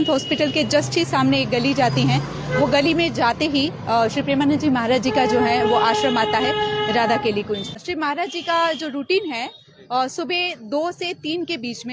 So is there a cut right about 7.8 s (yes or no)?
yes